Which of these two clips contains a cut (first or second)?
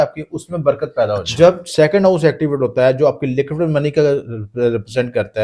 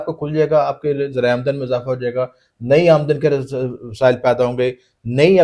first